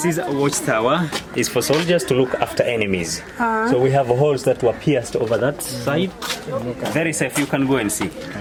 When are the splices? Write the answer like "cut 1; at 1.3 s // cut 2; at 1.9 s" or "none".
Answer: none

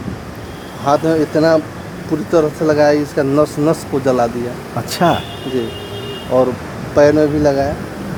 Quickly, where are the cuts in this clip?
none

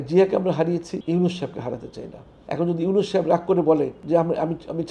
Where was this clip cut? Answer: cut 1; at 1.0 s // cut 2; at 2.3 s // cut 3; at 4.0 s

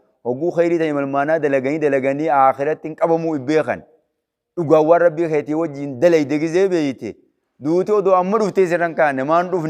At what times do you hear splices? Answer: none

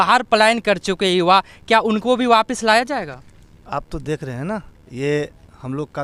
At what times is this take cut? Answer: none

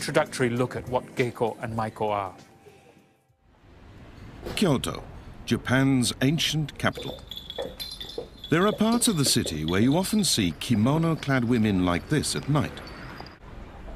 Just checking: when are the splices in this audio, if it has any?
cut 1; at 9.9 s

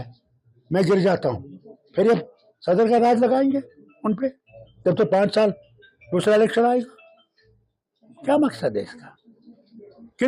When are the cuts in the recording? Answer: none

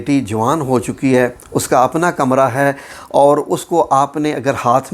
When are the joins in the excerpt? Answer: none

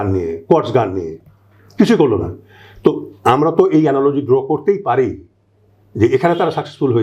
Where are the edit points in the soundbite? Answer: none

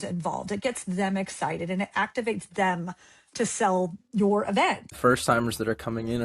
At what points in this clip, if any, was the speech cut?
cut 1; at 4.9 s

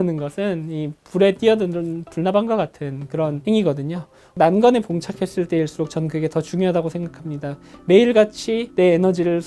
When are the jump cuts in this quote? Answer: cut 1; at 3.4 s // cut 2; at 4.3 s

